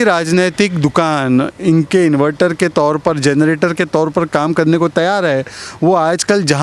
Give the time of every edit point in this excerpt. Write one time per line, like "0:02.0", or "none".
none